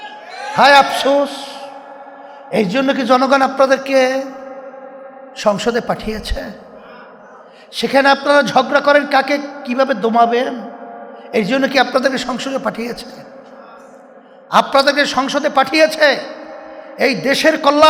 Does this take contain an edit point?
no; 0 cuts

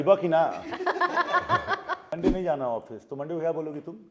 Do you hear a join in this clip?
yes; 1 cut; at 2.1 s

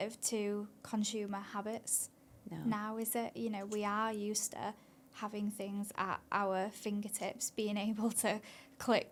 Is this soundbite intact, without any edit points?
yes; 0 cuts

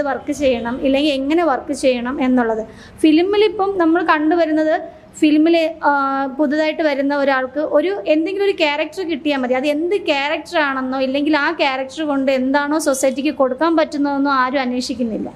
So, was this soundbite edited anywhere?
no; 0 cuts

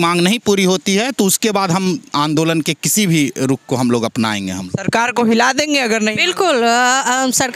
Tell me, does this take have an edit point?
no; 0 cuts

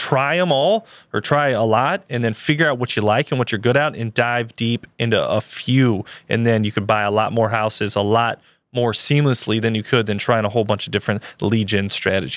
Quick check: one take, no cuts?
yes; 0 cuts

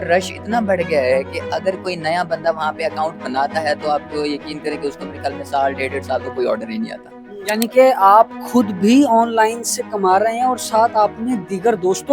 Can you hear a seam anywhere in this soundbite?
yes; 1 cut; at 7.4 s

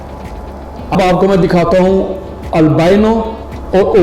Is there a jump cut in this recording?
yes; 1 cut; at 0.9 s

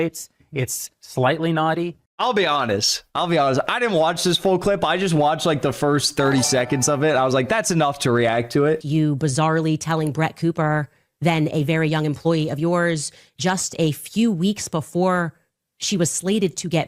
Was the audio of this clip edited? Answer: yes; 1 cut; at 8.8 s

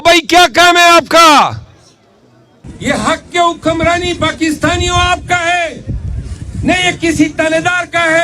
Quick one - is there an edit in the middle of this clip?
yes; 1 cut; at 2.7 s

